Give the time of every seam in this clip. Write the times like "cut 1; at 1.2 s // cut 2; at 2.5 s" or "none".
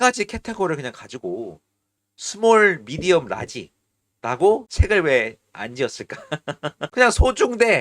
cut 1; at 4.7 s // cut 2; at 6.8 s